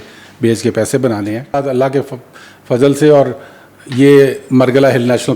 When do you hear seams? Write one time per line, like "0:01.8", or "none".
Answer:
0:01.5